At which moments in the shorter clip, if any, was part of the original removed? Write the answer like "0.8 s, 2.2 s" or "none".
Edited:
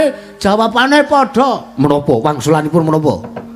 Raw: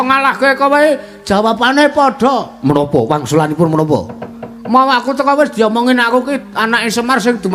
none